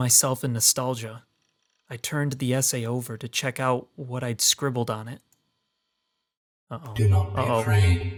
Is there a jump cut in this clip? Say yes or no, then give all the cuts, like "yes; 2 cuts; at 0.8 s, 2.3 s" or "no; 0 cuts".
no; 0 cuts